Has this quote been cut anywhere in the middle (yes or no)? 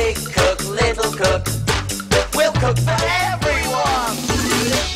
yes